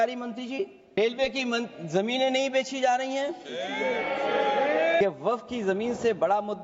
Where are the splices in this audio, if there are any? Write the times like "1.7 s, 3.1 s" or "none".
1.0 s, 5.0 s